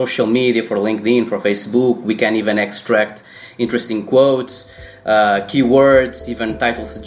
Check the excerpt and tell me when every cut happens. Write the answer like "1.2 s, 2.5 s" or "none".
none